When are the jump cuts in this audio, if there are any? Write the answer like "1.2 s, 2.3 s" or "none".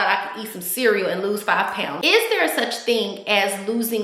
1.9 s

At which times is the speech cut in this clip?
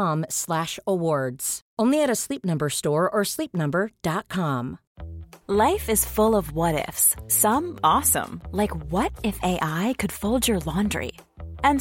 4.8 s

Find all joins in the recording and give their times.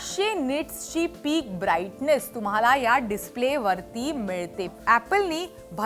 4.7 s

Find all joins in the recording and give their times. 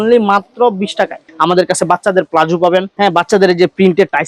1.2 s

